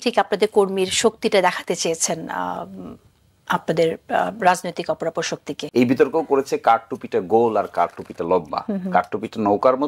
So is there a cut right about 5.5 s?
yes; 1 cut; at 5.5 s

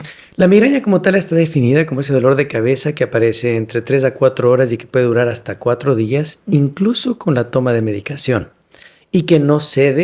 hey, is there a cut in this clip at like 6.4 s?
no; 0 cuts

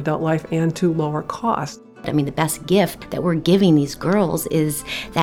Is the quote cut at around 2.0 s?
yes; 2 cuts; at 2.0 s, 3.0 s

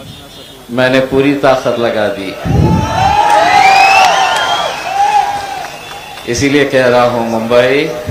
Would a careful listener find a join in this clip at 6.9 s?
no; 0 cuts

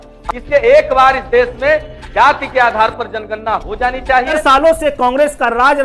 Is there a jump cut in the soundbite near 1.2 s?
no; 1 cut; at 4.3 s

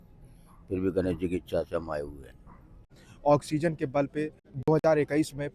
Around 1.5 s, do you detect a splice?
no; 2 cuts; at 2.9 s, 4.5 s

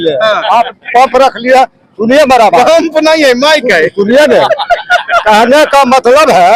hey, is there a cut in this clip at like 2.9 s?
no; 0 cuts

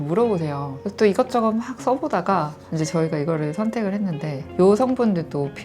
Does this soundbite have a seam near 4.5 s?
yes; 1 cut; at 4.5 s

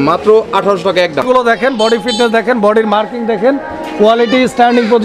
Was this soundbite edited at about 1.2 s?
yes; 1 cut; at 1.2 s

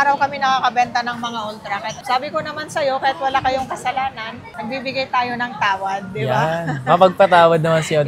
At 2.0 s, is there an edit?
yes; 1 cut; at 2.0 s

